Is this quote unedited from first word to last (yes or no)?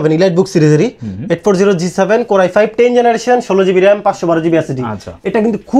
yes